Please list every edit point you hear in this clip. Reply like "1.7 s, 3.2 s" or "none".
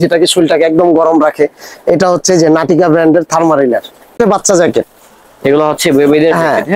4.1 s